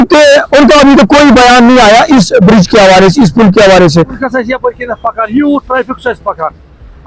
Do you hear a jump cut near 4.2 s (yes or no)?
yes